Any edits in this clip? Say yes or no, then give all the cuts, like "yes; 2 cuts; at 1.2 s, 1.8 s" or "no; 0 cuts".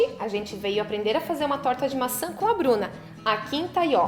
no; 0 cuts